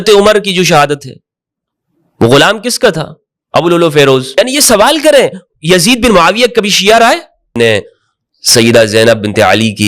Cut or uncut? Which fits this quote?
cut